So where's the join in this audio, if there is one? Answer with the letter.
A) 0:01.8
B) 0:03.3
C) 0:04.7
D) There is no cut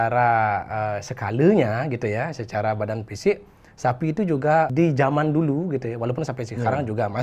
C